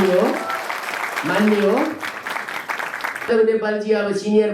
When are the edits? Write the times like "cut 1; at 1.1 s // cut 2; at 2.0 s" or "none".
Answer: cut 1; at 3.3 s